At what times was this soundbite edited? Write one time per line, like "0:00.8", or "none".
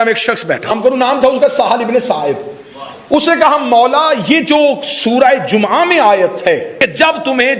0:00.7
0:06.7

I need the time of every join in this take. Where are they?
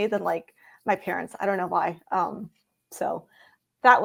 none

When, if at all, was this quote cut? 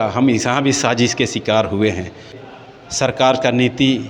0:02.4

